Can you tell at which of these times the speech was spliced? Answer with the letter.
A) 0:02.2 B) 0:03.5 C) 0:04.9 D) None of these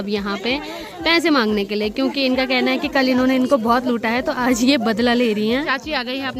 D